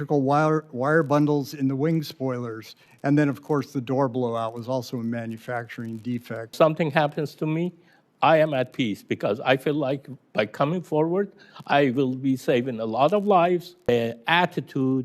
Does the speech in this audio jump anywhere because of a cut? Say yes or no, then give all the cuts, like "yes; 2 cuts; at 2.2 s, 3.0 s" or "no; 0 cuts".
yes; 2 cuts; at 6.5 s, 13.7 s